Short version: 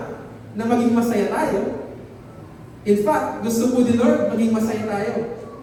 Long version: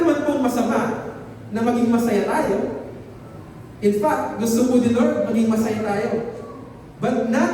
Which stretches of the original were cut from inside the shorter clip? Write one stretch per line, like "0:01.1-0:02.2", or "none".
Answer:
none